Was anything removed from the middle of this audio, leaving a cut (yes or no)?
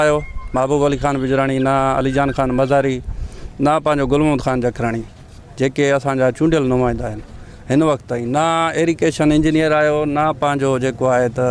no